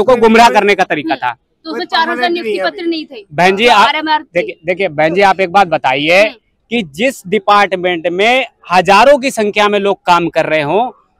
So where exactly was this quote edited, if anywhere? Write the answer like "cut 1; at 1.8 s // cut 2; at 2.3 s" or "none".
none